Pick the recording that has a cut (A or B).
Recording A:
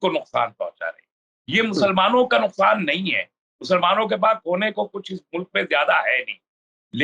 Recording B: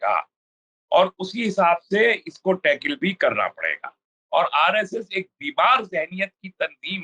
B